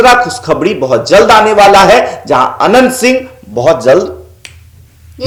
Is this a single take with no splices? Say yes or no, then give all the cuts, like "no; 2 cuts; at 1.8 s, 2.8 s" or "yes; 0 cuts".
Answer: yes; 0 cuts